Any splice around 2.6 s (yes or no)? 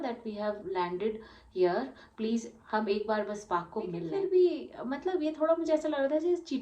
no